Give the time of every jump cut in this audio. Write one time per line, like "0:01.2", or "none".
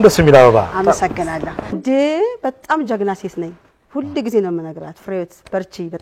0:01.8